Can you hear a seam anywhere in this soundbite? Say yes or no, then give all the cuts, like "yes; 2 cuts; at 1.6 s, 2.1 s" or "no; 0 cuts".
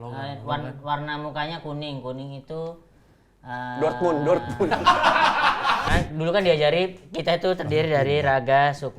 yes; 1 cut; at 5.8 s